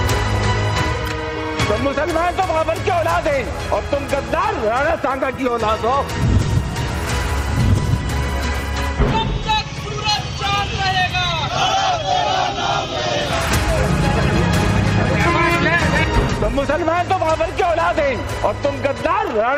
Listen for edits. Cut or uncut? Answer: uncut